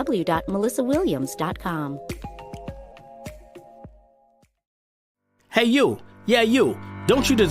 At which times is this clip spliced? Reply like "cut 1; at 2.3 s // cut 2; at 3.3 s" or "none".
cut 1; at 5.4 s